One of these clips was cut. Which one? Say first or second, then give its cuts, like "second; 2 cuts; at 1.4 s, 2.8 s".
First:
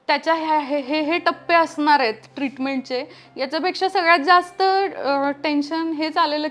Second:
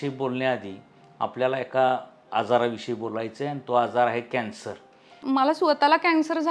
second; 1 cut; at 5.2 s